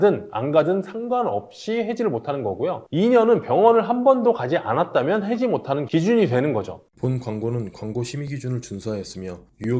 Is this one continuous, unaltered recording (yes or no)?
no